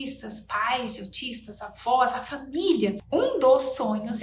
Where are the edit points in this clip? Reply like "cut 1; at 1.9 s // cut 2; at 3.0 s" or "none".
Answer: cut 1; at 3.0 s

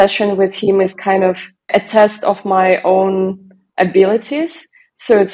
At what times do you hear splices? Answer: cut 1; at 1.7 s

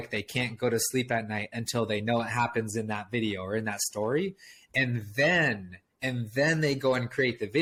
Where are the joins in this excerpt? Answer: none

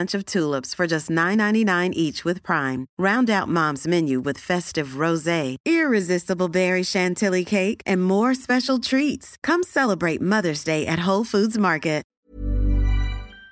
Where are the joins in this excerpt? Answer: cut 1; at 12.1 s

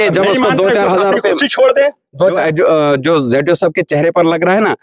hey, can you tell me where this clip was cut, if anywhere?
cut 1; at 2.2 s

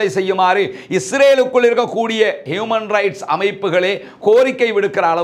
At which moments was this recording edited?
none

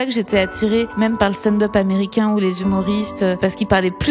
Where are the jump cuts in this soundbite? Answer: cut 1; at 0.9 s // cut 2; at 3.4 s

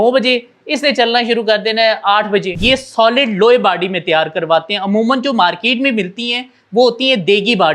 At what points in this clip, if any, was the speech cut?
cut 1; at 2.5 s

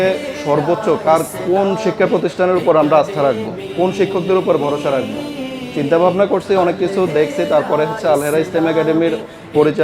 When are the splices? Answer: none

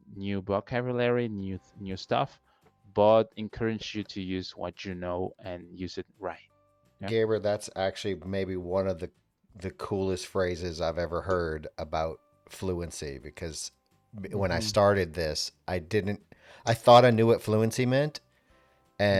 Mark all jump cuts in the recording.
none

